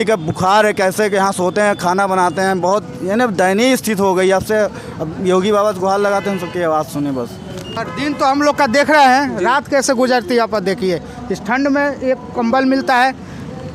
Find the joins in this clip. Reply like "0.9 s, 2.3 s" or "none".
7.7 s

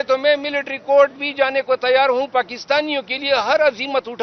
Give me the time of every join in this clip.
none

